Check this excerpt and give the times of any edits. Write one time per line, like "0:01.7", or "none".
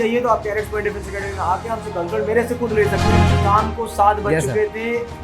0:03.3

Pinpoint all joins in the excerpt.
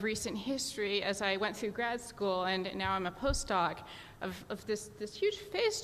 0:04.0

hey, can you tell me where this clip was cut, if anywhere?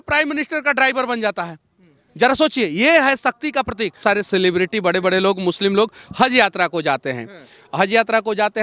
0:04.0

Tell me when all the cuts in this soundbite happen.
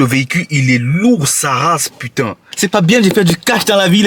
0:02.4

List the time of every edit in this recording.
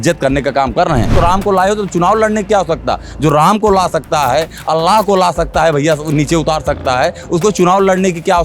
0:01.1

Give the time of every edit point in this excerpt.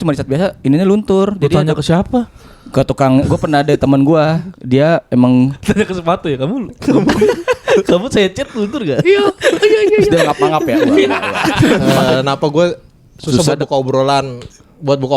0:11.9

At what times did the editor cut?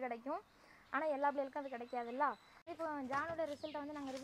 0:02.7

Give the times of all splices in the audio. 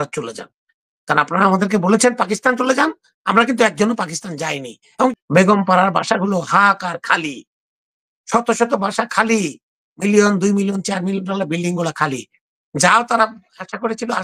0:05.1

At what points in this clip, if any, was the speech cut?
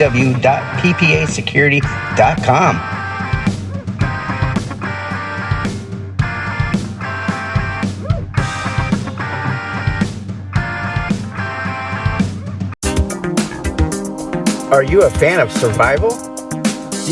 0:12.7

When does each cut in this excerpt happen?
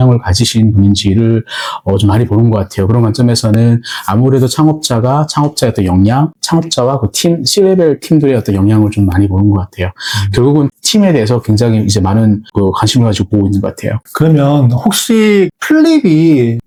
none

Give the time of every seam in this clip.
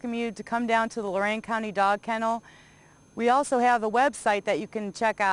none

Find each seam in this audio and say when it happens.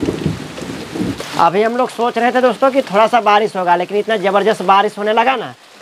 0:01.2

